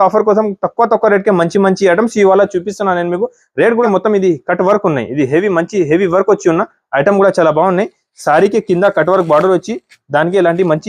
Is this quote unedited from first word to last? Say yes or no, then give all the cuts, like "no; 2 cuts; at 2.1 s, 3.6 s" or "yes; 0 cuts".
no; 1 cut; at 3.8 s